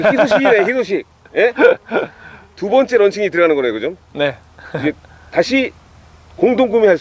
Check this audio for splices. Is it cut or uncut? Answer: uncut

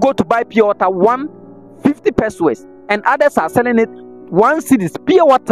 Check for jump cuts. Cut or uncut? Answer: uncut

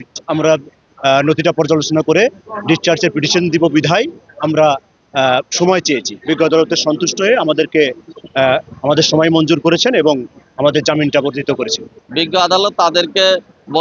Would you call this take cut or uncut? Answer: cut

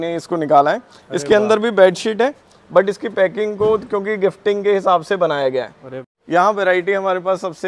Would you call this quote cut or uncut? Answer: cut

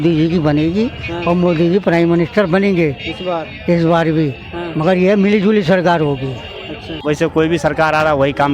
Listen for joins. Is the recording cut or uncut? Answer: cut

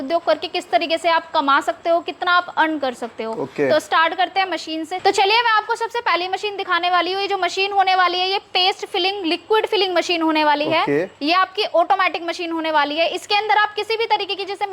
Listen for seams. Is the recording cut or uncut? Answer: uncut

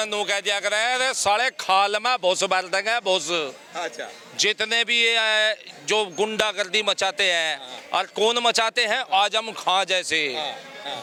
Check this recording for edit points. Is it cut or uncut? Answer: uncut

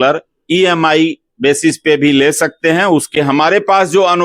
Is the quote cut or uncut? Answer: cut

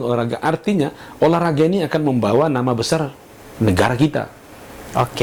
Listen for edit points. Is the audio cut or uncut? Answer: uncut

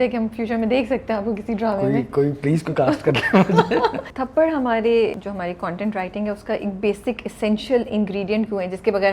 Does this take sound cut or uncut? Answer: cut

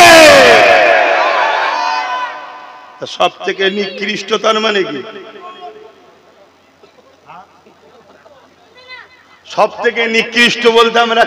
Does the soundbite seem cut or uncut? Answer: cut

